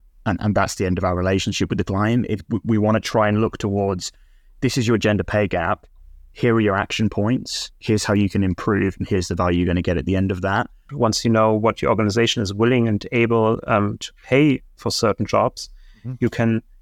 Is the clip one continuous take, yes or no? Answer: no